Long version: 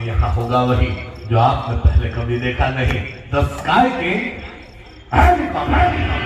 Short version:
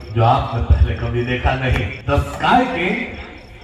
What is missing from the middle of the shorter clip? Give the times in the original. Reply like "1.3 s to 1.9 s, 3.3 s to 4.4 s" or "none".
3.1 s to 3.2 s

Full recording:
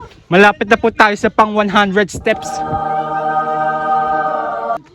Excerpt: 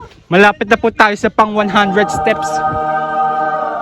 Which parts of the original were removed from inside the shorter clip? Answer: 2.2 s to 2.9 s

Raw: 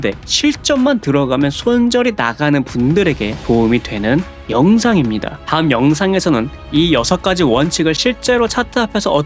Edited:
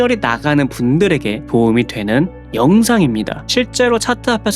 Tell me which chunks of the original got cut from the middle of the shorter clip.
5.4 s to 8.0 s

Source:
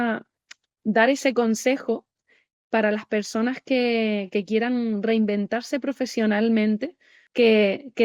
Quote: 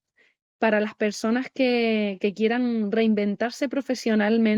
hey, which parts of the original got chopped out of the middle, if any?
none

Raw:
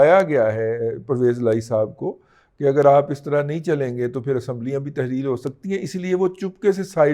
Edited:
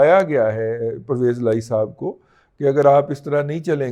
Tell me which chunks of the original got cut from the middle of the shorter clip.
none

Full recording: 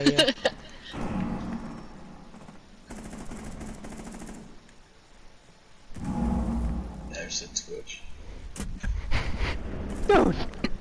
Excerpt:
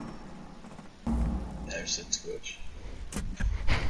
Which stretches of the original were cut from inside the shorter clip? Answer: 2.8 s to 6.5 s

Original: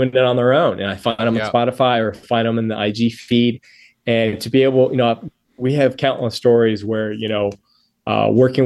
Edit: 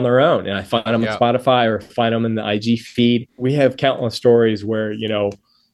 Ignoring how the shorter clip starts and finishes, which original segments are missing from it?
3.6 s to 5.5 s

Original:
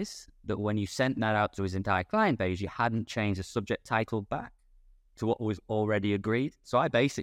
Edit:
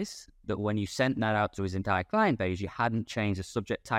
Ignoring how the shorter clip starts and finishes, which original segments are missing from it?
none

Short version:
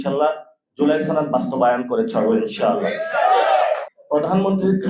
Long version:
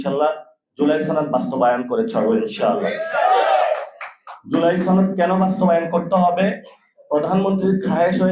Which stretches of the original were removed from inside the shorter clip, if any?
3.9 s to 6.9 s

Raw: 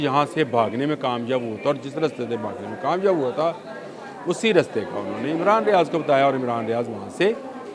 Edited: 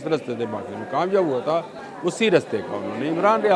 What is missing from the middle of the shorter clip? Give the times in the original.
3.7 s to 4.0 s

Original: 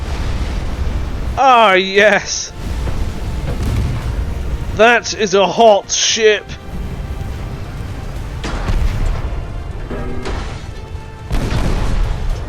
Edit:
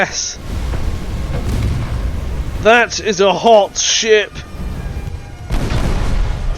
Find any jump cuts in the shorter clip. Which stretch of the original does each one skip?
7.3 s to 10.9 s

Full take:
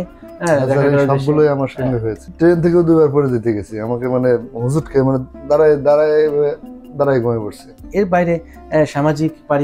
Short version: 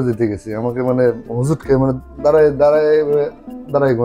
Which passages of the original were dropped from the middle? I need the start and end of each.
none

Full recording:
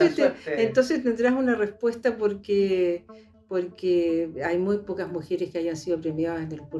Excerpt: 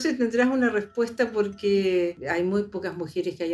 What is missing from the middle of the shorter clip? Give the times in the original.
3.1 s to 4.4 s

